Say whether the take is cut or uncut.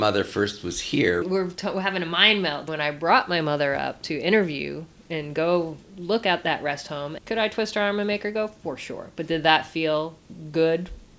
cut